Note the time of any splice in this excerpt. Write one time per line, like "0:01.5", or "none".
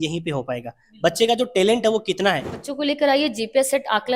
0:02.5